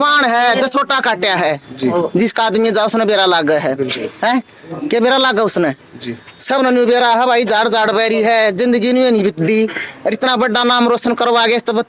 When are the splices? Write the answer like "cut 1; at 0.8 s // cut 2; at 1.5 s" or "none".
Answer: none